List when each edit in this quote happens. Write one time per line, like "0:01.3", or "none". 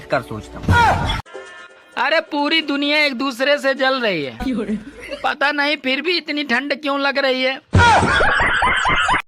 none